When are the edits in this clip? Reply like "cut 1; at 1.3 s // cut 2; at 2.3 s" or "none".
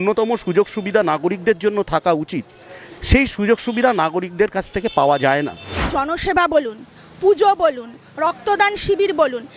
cut 1; at 5.9 s